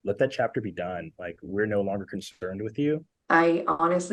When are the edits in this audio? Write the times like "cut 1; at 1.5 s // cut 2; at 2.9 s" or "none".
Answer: cut 1; at 3.2 s